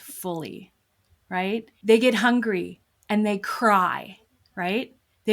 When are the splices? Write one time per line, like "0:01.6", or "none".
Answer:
0:01.7